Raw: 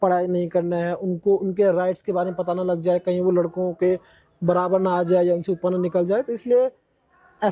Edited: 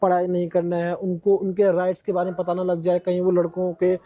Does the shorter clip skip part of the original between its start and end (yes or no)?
no